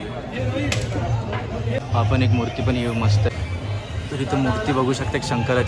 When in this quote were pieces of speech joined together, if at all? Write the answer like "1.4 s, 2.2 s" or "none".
1.8 s, 3.3 s

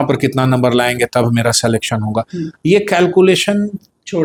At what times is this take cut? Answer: none

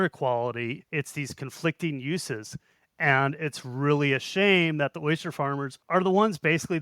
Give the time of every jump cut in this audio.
5.8 s

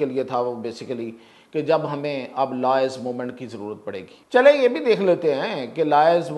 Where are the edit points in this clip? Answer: 4.1 s

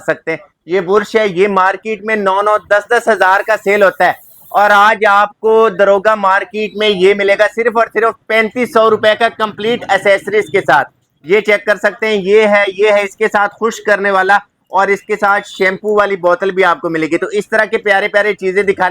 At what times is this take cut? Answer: none

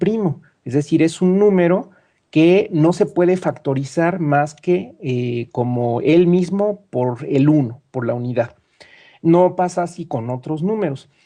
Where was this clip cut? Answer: 5.7 s

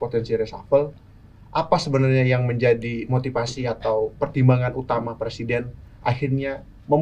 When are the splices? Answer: none

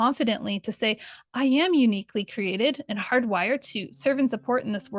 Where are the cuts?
none

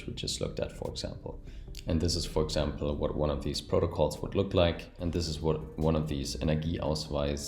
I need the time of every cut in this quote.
1.3 s, 4.9 s

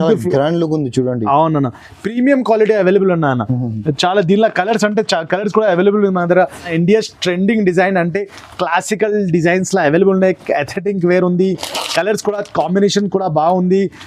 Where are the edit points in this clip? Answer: 6.7 s

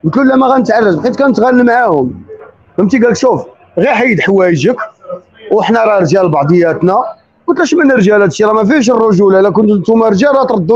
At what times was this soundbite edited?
none

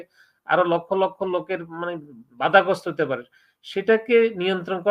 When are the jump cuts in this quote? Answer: none

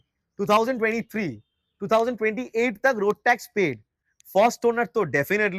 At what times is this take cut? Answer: none

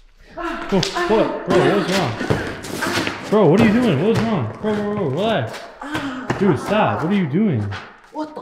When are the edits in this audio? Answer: none

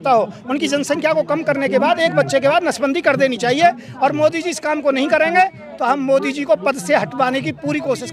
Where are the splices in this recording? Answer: none

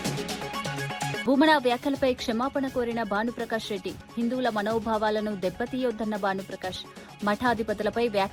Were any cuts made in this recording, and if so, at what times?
1.2 s

